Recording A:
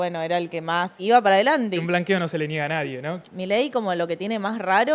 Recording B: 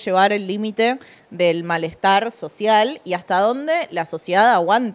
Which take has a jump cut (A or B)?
A